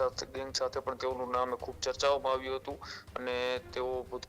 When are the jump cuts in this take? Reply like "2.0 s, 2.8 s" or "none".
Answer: none